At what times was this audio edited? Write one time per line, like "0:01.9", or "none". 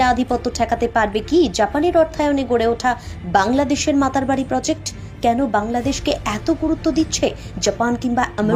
none